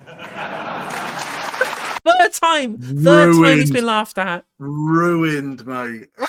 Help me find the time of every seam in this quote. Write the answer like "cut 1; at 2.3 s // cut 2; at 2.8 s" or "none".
none